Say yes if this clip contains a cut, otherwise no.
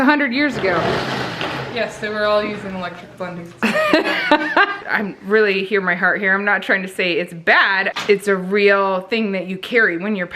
yes